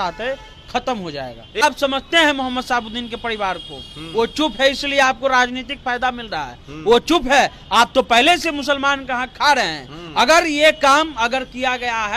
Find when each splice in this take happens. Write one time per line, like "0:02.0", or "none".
0:01.6